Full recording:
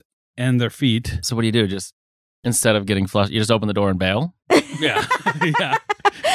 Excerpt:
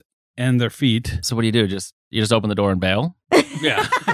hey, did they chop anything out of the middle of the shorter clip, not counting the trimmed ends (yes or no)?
yes